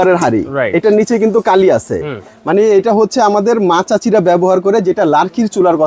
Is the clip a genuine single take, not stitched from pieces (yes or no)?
yes